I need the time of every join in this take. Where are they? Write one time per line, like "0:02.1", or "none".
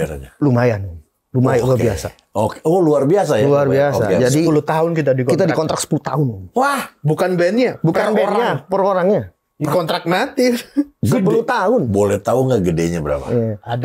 none